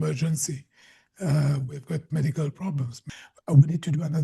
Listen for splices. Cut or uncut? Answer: cut